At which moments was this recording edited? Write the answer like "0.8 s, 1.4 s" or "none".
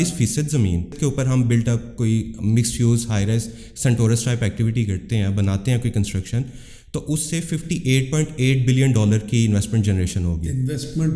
1.0 s

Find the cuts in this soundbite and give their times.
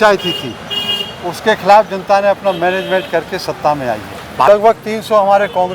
4.5 s

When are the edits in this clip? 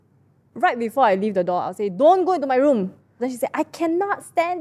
3.2 s

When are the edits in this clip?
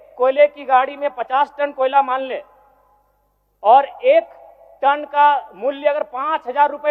none

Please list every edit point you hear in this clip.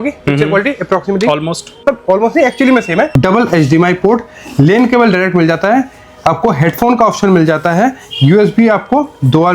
1.8 s, 3.1 s

